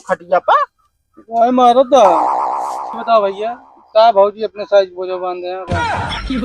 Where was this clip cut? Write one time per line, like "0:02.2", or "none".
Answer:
0:02.6